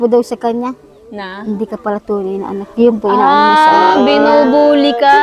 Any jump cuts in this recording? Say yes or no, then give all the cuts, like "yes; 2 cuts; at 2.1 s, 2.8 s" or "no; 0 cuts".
no; 0 cuts